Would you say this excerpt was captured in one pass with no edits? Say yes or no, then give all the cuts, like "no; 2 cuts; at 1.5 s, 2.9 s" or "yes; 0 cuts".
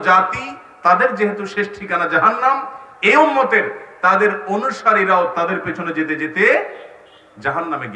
yes; 0 cuts